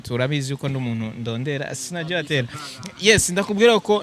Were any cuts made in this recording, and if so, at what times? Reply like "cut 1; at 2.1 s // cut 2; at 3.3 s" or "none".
none